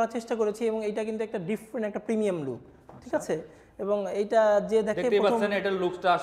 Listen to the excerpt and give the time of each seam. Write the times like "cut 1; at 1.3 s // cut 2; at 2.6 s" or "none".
none